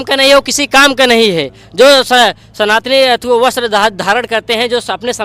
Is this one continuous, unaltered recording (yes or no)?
yes